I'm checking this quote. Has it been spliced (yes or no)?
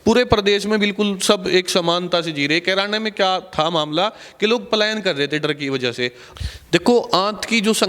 yes